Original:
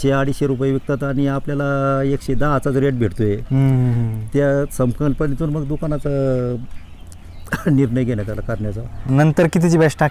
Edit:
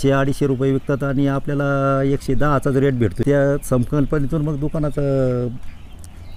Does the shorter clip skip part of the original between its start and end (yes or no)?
yes